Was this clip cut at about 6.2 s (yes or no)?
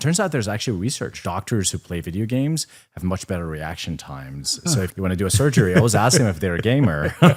no